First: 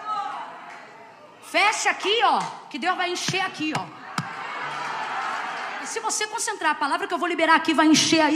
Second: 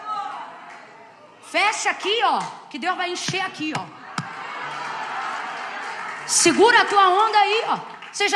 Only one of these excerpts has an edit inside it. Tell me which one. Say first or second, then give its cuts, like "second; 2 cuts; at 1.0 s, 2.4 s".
first; 1 cut; at 5.9 s